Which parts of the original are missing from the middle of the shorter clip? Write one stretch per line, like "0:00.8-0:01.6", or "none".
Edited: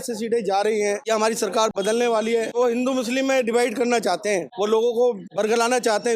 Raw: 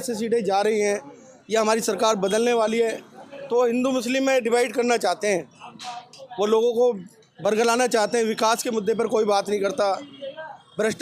0:01.0-0:01.5
0:03.0-0:03.5
0:05.5-0:06.3
0:07.1-0:07.3

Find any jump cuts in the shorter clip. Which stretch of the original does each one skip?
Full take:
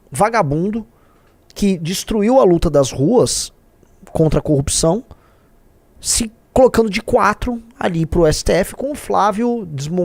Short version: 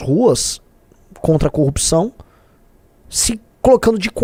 none

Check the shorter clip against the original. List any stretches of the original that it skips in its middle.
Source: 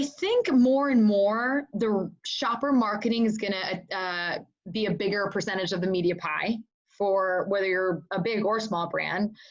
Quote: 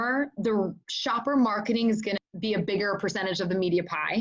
0:03.6-0:04.6

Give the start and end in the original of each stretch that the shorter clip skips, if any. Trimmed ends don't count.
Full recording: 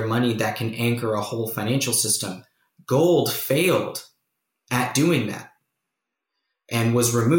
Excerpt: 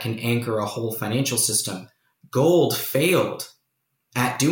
none

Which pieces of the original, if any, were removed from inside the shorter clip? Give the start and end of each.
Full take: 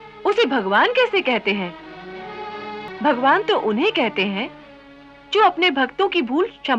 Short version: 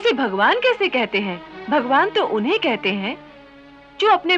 0:01.8-0:02.8

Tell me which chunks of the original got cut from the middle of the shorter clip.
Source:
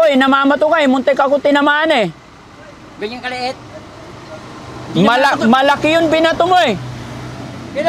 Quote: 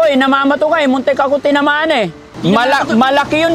0:02.2-0:04.8

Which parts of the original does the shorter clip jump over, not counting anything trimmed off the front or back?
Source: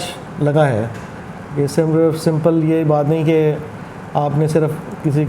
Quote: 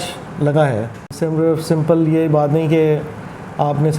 0:01.2-0:01.7

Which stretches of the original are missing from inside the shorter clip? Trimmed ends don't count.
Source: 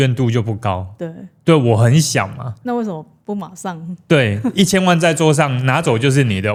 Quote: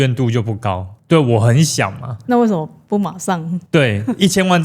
0:00.9-0:01.3

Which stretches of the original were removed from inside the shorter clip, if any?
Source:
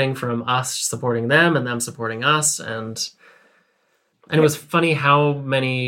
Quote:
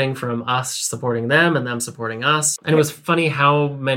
0:02.5-0:04.2

